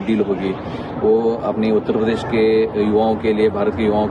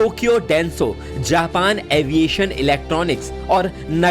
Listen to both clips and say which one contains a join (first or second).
second